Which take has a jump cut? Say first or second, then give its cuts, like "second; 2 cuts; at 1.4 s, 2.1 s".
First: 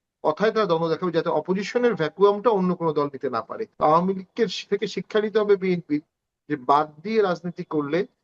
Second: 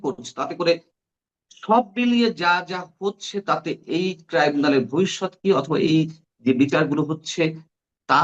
first; 1 cut; at 3.6 s